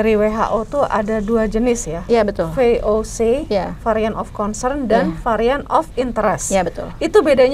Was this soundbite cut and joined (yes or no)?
no